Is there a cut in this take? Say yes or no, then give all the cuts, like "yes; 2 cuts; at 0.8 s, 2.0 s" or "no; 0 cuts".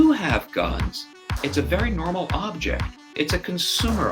yes; 1 cut; at 3.1 s